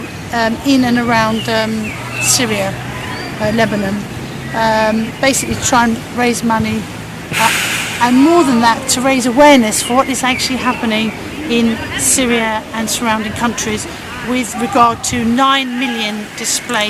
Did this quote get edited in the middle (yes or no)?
no